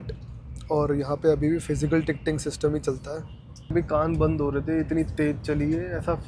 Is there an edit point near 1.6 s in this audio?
no; 1 cut; at 3.7 s

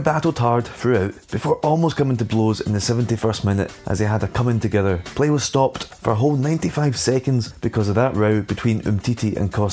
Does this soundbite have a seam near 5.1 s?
yes; 5 cuts; at 1.2 s, 3.8 s, 5.1 s, 5.9 s, 7.5 s

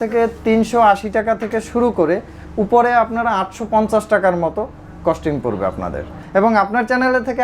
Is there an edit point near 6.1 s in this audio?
yes; 1 cut; at 6.1 s

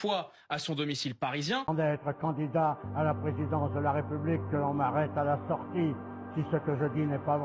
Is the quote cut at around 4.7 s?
no; 1 cut; at 1.7 s

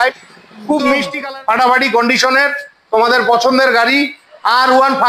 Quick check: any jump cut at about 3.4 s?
no; 1 cut; at 1.1 s

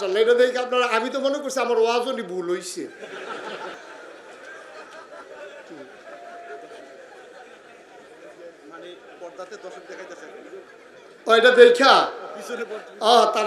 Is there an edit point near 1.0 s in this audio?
no; 1 cut; at 3.7 s

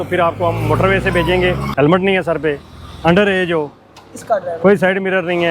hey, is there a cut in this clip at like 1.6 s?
yes; 1 cut; at 1.6 s

